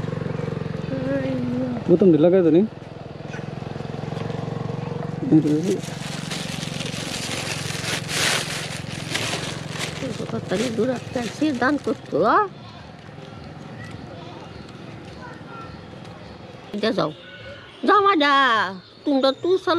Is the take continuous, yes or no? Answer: no